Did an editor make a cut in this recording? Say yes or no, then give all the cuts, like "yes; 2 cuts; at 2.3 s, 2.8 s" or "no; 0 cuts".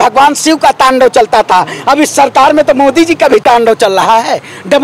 no; 0 cuts